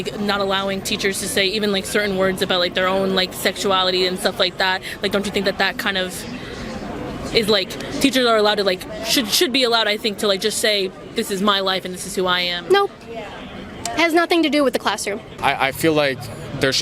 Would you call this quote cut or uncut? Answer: cut